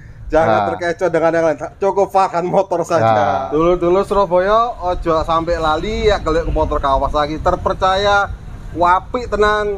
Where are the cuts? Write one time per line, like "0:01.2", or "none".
0:03.4